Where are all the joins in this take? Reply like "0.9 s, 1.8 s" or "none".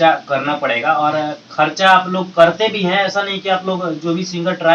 none